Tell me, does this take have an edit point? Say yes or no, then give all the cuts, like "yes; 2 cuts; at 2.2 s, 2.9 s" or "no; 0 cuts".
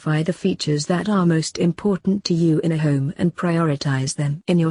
no; 0 cuts